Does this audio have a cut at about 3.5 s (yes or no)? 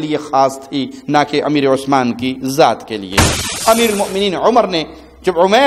yes